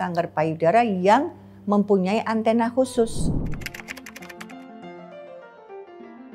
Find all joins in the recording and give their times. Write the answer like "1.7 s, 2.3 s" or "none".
3.1 s